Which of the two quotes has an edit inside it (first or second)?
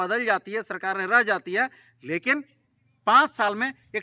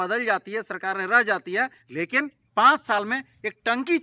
second